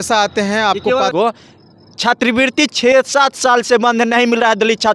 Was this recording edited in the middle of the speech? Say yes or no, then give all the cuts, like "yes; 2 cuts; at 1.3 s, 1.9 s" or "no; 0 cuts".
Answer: yes; 1 cut; at 1.1 s